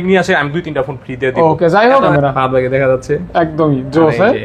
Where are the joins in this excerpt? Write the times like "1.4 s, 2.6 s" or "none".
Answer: 2.1 s